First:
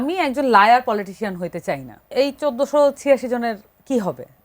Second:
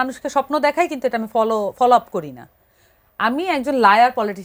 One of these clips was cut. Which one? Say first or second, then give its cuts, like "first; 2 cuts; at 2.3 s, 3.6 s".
first; 1 cut; at 2.1 s